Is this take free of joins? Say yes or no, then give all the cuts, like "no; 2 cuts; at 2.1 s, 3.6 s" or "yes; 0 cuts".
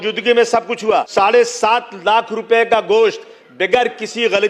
no; 1 cut; at 1.1 s